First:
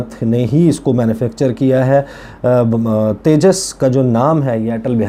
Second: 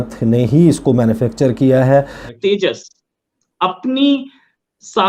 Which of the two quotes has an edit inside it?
second; 1 cut; at 2.3 s

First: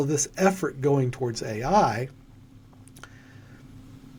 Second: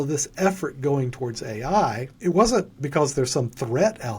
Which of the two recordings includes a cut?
second; 1 cut; at 2.1 s

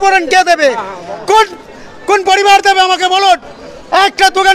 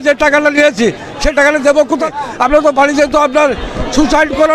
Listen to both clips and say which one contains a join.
second; 1 cut; at 2.1 s

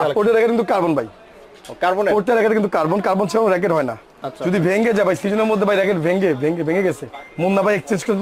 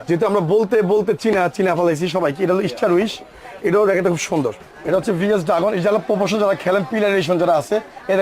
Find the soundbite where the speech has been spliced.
second; 1 cut; at 4.6 s

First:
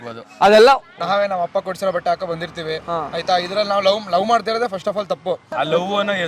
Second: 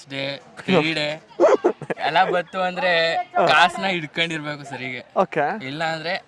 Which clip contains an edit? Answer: first; 2 cuts; at 0.9 s, 5.4 s

